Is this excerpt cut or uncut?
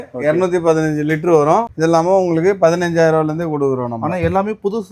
cut